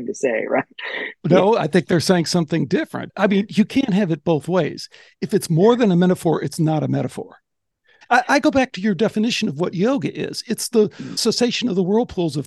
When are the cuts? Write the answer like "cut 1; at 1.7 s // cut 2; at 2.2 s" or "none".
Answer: cut 1; at 1.2 s // cut 2; at 3.0 s // cut 3; at 7.9 s